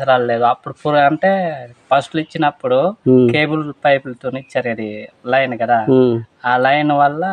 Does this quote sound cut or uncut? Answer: uncut